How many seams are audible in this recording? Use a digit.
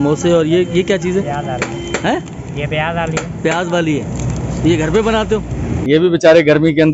1